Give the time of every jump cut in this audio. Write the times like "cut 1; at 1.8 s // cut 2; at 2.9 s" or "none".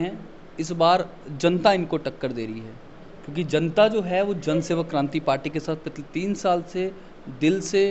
none